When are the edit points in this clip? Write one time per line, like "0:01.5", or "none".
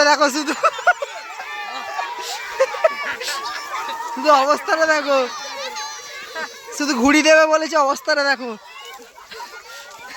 none